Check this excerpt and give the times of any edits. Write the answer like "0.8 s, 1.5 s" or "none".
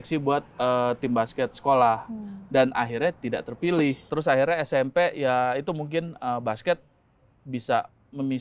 4.1 s